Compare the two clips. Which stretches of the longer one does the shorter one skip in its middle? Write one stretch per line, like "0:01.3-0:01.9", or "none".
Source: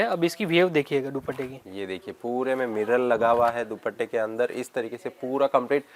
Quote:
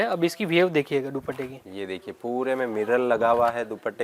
none